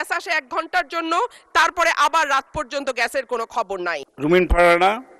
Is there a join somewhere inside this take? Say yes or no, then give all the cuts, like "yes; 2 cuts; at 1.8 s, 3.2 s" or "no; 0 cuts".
yes; 1 cut; at 4.1 s